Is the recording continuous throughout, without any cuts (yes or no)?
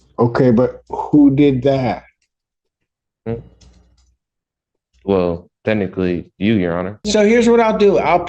no